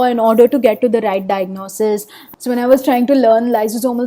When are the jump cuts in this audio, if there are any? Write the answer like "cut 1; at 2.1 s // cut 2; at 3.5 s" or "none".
cut 1; at 2.3 s